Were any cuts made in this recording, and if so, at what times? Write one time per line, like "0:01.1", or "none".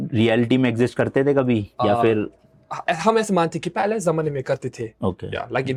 none